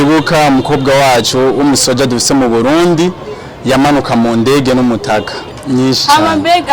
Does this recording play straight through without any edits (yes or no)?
no